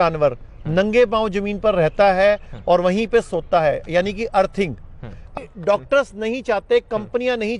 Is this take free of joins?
no; 1 cut; at 5.3 s

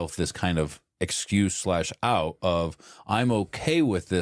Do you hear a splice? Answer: no; 0 cuts

